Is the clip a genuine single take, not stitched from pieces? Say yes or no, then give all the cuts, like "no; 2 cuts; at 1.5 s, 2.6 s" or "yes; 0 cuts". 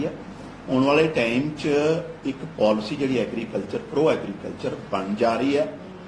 yes; 0 cuts